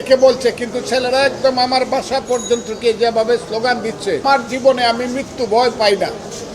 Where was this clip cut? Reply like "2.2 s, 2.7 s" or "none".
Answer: 4.2 s